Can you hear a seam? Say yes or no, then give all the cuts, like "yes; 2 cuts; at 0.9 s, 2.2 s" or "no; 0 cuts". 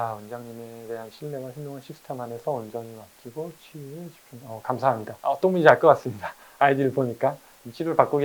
no; 0 cuts